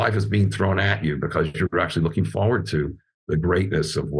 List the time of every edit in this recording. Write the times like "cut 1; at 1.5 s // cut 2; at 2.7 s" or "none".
none